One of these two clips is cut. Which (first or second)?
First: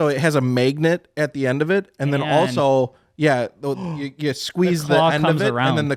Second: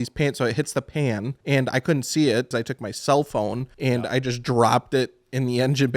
second